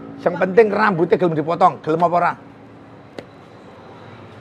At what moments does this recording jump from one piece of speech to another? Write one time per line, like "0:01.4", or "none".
none